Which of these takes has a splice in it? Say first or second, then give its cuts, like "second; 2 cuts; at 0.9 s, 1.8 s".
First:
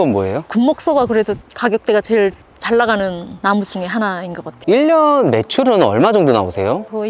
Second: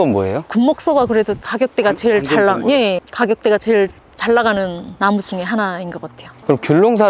first; 2 cuts; at 1.5 s, 4.4 s